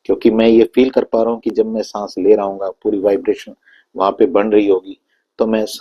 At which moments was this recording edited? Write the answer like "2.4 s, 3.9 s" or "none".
none